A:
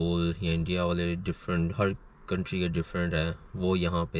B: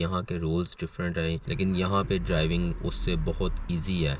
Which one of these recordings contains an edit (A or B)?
B